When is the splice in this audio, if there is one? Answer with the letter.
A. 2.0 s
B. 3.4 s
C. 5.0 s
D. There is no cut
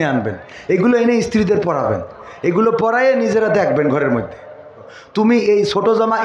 C